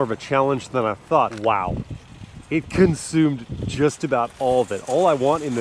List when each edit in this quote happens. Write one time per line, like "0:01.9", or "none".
0:01.3

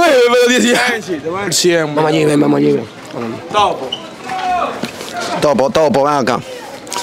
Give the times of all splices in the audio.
0:01.5

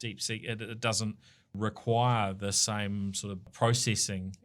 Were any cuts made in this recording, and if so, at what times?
0:01.5
0:03.4

